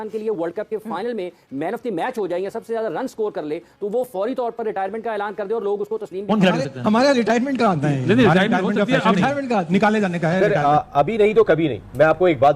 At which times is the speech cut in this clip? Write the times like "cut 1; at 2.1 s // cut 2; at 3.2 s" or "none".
cut 1; at 6.3 s // cut 2; at 10.4 s